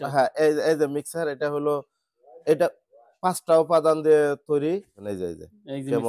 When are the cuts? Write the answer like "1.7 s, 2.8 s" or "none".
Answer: 5.0 s